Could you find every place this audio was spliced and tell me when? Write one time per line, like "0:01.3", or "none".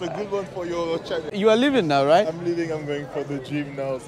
0:01.3